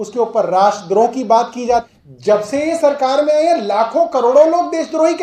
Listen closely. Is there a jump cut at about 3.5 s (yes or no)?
no